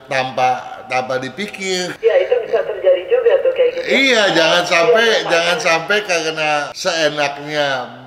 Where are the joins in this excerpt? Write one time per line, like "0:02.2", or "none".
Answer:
0:01.9